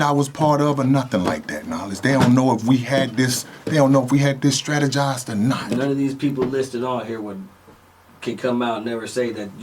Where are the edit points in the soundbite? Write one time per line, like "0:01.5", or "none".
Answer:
0:05.7